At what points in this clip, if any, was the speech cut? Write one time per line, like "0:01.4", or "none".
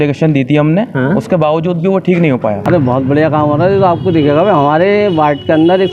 0:02.6